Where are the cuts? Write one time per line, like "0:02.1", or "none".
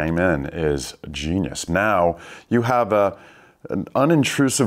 0:01.6